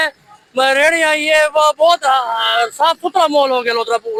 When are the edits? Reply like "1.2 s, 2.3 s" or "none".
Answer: none